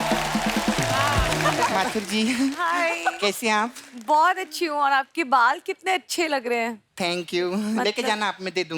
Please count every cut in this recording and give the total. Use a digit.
1